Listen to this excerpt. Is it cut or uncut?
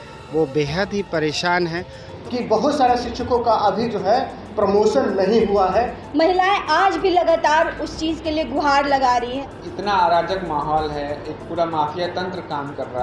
cut